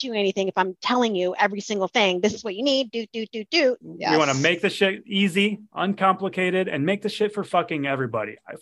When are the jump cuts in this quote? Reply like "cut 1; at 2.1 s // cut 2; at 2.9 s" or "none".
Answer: cut 1; at 3.9 s